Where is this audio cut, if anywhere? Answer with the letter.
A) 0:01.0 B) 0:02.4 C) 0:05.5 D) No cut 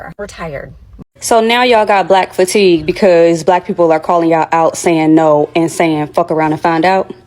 A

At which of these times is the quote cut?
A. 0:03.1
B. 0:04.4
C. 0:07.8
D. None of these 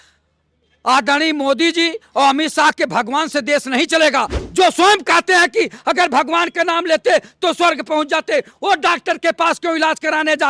B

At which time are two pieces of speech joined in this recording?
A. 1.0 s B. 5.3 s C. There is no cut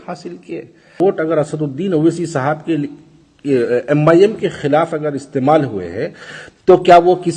A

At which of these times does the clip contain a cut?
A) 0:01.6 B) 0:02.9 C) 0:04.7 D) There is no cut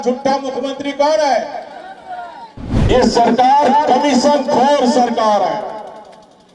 B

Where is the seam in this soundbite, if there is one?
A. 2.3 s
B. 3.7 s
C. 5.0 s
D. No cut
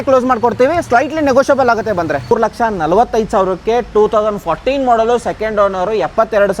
A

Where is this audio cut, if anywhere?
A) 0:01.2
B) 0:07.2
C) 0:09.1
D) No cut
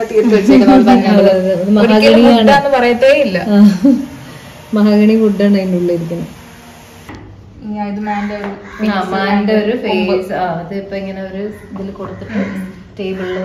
B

